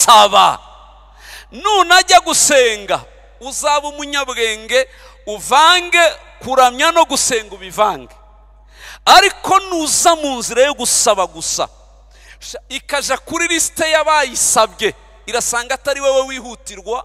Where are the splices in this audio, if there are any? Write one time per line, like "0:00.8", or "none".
none